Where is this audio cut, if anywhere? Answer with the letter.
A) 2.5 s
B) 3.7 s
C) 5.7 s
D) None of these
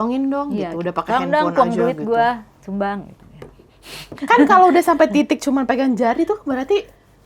D